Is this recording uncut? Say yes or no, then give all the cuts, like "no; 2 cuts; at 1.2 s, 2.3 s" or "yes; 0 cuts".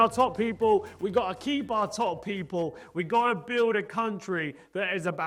yes; 0 cuts